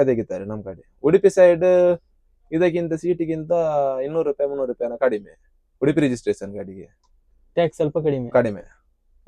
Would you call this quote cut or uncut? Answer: uncut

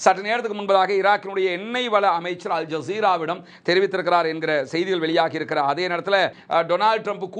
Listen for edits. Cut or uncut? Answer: cut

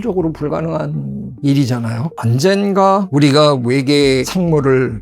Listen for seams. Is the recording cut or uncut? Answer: cut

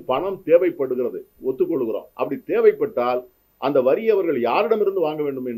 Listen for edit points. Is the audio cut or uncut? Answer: uncut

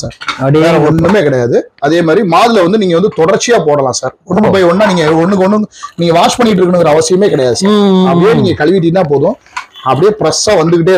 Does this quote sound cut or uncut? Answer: uncut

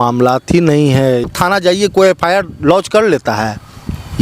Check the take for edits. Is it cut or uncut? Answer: cut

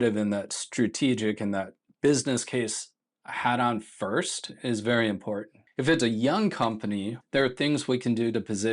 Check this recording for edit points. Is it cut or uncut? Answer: cut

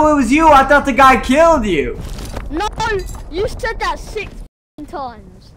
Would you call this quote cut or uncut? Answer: uncut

